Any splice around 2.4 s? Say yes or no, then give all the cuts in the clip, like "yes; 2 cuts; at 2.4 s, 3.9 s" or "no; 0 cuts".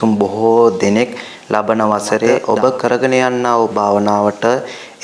yes; 1 cut; at 2.4 s